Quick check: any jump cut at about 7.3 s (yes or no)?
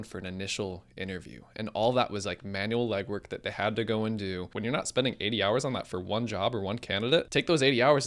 yes